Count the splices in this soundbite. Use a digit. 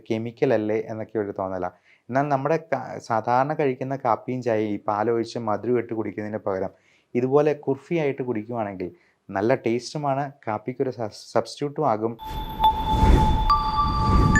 1